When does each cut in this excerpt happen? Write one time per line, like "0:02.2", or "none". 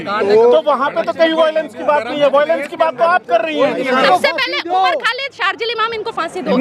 0:04.1

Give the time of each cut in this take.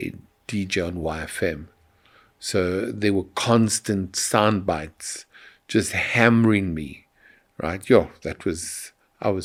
none

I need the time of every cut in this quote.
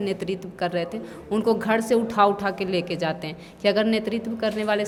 none

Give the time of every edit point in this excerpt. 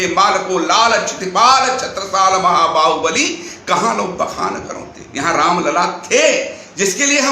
0:05.0

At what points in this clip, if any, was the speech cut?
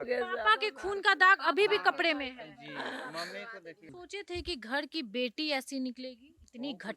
0:04.0

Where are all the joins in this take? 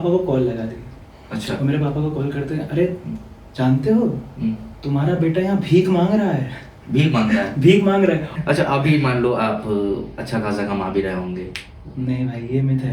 0:08.3

